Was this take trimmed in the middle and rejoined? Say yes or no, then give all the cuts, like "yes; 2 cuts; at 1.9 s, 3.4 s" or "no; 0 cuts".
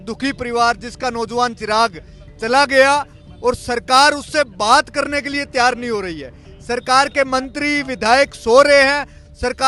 no; 0 cuts